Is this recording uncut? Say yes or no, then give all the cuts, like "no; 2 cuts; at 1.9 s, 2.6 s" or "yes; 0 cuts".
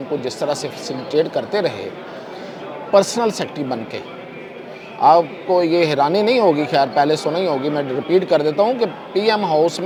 yes; 0 cuts